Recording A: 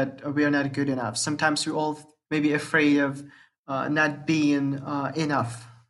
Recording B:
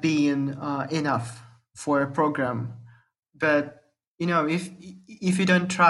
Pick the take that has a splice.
A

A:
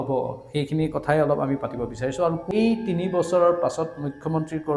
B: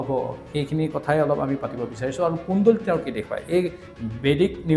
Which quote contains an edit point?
A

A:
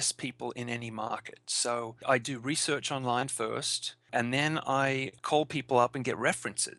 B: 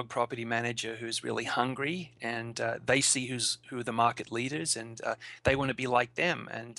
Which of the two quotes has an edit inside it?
A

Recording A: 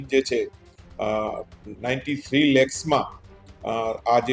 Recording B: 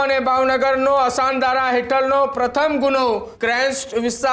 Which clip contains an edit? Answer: B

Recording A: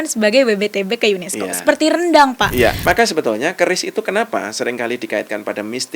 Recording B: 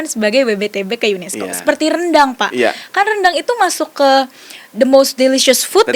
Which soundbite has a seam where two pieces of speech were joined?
A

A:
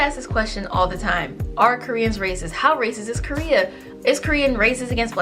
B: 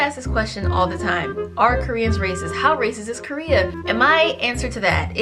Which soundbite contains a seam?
B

